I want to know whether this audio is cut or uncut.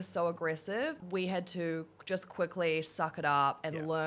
cut